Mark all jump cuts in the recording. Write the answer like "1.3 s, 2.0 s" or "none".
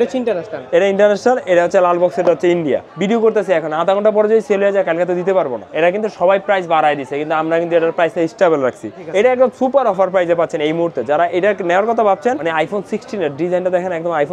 2.9 s, 5.6 s, 9.0 s, 12.4 s